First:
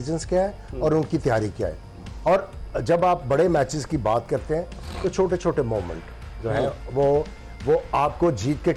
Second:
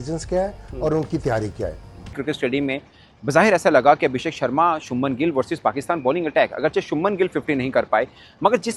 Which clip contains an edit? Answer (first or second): second